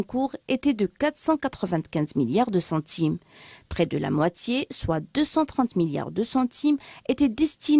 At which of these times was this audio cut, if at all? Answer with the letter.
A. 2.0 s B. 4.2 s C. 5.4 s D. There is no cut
B